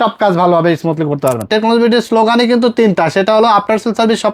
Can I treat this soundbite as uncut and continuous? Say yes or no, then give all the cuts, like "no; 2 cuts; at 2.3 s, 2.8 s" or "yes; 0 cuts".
no; 1 cut; at 1.5 s